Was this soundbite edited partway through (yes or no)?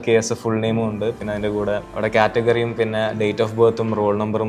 yes